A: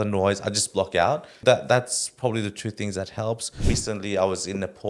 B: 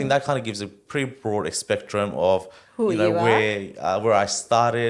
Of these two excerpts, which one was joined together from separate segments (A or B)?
A